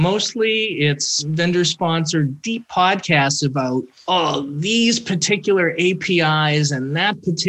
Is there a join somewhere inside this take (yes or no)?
yes